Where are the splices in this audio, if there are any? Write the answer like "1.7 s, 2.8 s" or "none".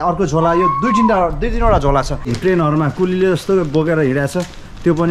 2.2 s